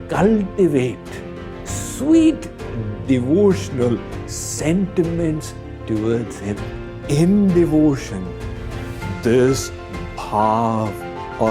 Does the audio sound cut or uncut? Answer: cut